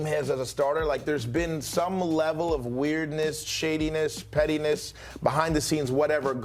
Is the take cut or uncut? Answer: uncut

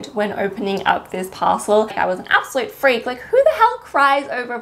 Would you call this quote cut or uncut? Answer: cut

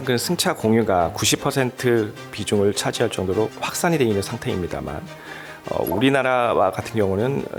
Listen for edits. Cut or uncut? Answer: uncut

